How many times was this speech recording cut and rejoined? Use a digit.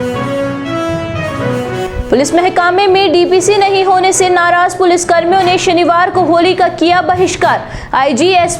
1